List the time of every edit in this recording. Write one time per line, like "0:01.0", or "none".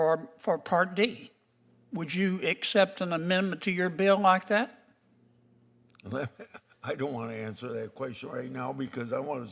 none